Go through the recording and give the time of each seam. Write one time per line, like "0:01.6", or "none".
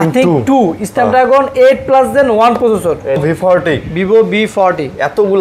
0:03.2